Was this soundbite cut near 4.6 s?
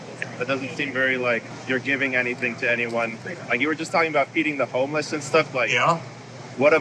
no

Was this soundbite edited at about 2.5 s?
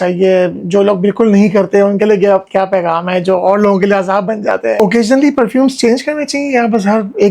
no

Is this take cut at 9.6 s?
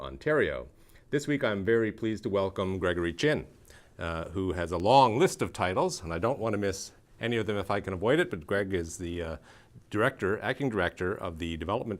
yes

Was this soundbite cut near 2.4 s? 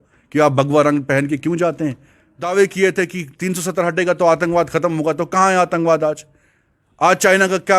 yes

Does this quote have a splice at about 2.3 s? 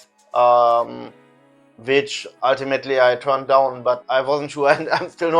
no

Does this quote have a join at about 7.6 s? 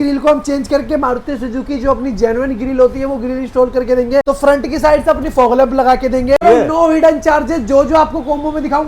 no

